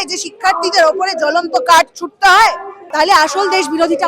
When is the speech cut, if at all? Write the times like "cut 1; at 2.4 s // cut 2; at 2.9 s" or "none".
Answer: cut 1; at 2.7 s